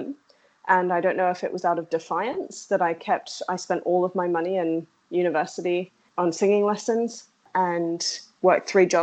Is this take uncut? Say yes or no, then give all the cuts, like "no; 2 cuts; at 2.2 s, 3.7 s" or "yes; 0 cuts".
no; 2 cuts; at 6.0 s, 7.4 s